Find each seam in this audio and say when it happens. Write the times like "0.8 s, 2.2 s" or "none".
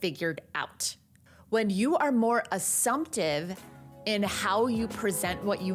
none